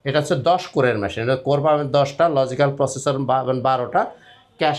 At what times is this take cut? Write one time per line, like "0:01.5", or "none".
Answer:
none

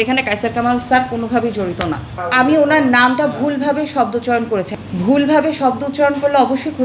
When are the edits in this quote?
0:02.2
0:04.7

